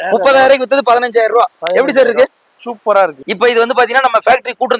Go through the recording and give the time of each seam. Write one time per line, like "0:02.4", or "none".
0:03.2